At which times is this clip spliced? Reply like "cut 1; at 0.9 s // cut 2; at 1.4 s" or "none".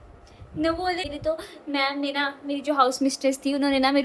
cut 1; at 1.1 s